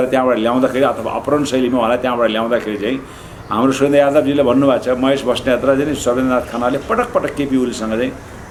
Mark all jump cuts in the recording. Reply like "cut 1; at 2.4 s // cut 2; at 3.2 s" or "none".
none